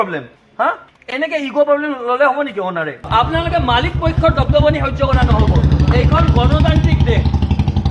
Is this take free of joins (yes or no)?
no